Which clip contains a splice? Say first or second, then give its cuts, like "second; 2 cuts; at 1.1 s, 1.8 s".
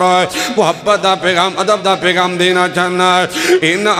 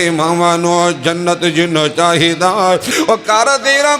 second; 1 cut; at 2.9 s